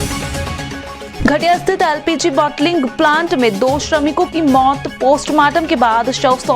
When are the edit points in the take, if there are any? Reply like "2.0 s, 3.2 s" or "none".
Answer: 1.1 s